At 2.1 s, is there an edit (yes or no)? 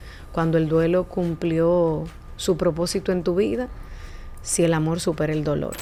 no